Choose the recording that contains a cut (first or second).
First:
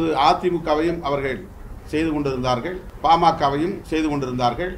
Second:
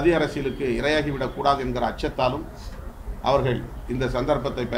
first